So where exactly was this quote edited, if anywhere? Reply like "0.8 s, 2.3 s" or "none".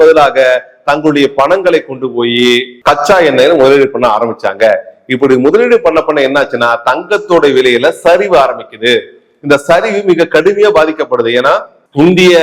none